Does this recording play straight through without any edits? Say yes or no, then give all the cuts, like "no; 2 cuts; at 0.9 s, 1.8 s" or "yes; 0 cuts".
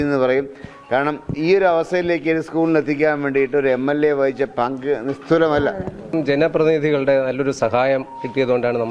no; 1 cut; at 6.1 s